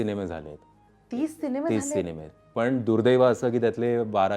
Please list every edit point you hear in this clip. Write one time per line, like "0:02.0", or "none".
none